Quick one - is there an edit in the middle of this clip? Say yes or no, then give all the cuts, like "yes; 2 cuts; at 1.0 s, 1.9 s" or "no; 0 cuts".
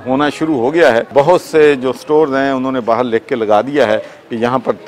yes; 1 cut; at 1.1 s